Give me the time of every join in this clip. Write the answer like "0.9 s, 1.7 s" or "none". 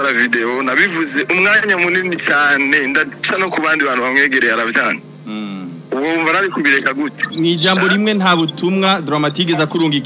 7.2 s